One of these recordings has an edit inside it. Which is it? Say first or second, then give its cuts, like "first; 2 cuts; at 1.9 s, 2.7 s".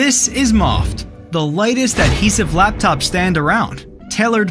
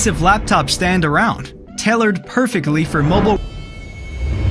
second; 1 cut; at 3.4 s